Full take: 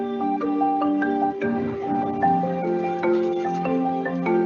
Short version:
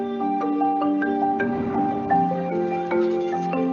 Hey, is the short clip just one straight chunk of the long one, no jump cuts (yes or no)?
no